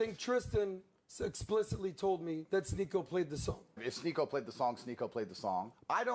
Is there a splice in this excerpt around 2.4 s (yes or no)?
yes